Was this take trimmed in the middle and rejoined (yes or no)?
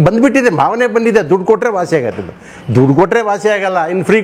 no